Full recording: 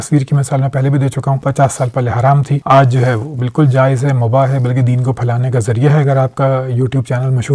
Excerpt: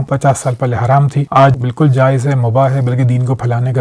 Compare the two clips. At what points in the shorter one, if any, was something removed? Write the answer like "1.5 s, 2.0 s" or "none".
1.6 s